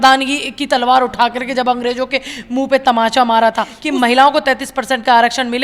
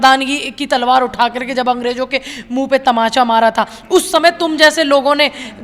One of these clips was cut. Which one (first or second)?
first